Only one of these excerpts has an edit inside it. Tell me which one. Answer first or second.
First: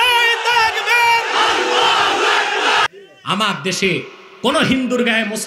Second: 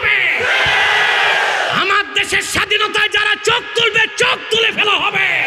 first